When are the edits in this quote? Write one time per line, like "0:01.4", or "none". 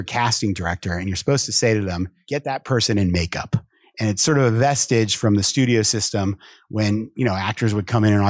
0:02.2